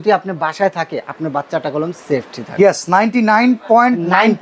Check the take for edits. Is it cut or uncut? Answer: uncut